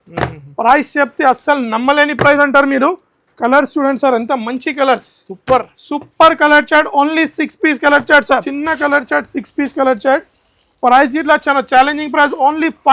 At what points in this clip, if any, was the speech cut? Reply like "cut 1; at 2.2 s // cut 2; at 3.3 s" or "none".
cut 1; at 8.5 s